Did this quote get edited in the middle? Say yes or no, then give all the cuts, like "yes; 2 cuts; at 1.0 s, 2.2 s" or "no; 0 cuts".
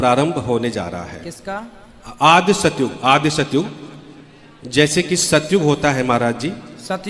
no; 0 cuts